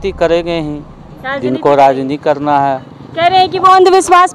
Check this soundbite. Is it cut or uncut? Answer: uncut